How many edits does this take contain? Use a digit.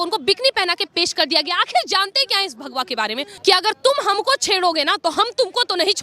1